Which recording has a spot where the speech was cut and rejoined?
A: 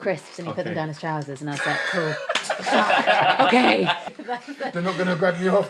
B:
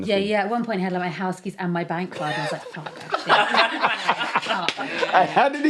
A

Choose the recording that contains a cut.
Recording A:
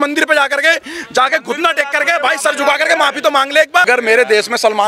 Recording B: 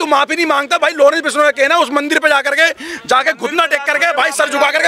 A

